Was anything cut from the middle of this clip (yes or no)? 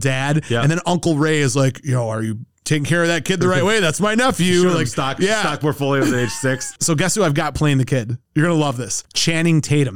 yes